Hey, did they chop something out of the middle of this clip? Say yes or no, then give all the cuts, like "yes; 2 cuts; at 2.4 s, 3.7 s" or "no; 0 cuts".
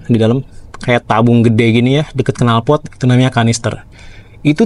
no; 0 cuts